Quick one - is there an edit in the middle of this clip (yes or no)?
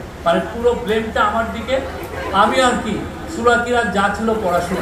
no